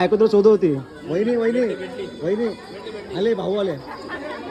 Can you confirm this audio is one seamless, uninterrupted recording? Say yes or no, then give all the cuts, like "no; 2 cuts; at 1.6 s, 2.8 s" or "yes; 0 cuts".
yes; 0 cuts